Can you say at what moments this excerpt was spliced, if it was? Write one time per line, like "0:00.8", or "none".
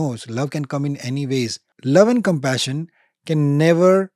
0:01.7